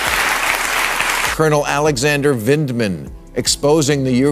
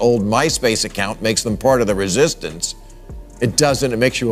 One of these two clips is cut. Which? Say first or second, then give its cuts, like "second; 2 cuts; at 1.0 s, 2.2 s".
first; 1 cut; at 1.0 s